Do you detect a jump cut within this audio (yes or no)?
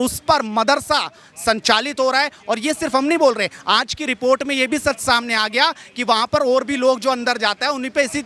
no